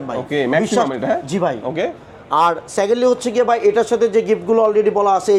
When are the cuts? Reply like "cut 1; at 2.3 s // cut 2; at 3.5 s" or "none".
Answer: none